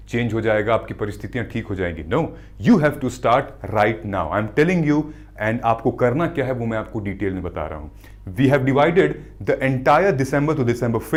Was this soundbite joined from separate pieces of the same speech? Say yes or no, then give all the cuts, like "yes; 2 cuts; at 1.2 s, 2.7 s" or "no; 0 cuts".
no; 0 cuts